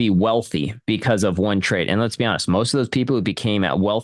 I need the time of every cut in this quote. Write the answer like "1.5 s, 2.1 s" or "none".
none